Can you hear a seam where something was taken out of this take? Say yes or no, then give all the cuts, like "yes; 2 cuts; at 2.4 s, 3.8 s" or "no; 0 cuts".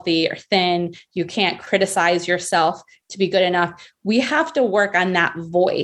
no; 0 cuts